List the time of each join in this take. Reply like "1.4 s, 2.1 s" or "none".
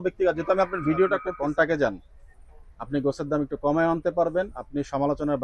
1.3 s